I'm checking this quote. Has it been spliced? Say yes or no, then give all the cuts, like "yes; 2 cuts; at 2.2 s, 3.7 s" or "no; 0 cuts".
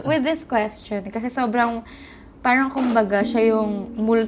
no; 0 cuts